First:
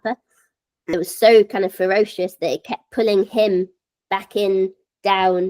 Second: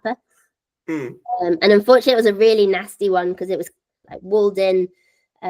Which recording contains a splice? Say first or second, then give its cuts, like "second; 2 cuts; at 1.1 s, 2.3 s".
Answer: first; 1 cut; at 0.9 s